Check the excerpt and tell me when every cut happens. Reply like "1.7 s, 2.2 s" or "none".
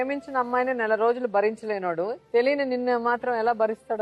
2.2 s